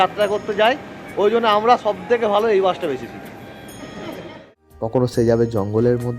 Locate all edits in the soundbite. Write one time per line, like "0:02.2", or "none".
0:04.9